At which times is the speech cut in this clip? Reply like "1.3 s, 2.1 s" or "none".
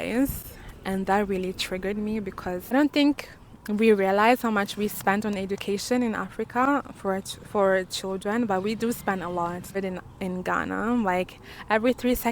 2.7 s, 9.7 s